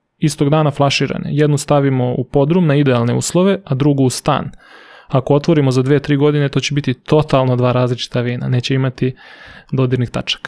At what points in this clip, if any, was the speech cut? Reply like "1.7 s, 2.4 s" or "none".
none